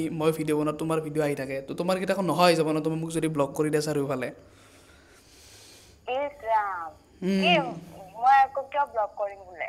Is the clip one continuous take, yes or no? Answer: yes